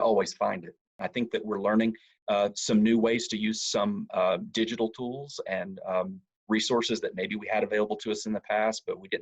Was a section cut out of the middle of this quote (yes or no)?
yes